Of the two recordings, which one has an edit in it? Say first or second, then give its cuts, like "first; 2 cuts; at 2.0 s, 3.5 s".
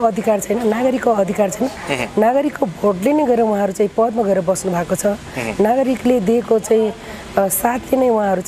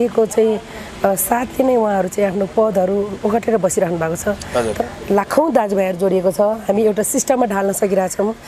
second; 1 cut; at 4.8 s